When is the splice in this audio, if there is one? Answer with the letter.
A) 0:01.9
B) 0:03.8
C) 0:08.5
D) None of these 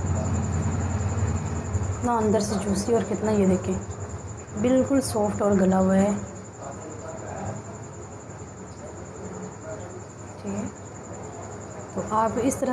A